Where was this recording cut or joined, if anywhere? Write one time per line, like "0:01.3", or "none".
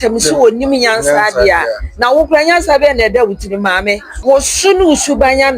0:04.1